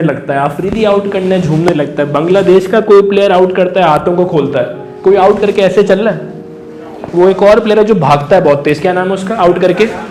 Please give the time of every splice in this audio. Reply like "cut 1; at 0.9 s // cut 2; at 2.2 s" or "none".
none